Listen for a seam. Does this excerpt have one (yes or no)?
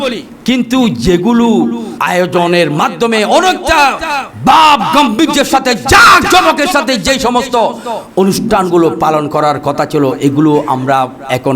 yes